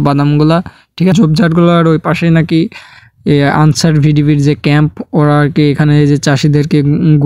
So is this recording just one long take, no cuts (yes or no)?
no